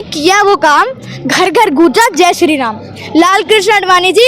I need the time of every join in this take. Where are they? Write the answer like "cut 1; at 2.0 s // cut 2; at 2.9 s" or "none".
none